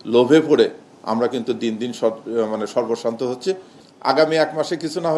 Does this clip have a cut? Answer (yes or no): yes